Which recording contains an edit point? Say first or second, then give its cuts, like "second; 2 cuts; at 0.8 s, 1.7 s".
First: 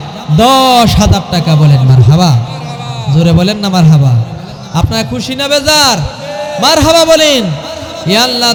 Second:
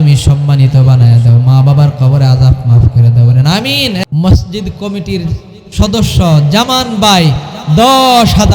second; 1 cut; at 4.0 s